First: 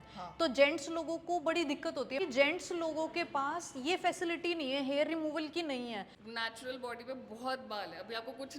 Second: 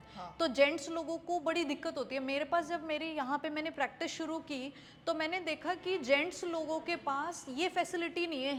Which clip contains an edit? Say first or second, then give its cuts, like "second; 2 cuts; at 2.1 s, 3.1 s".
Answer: first; 2 cuts; at 2.2 s, 6.2 s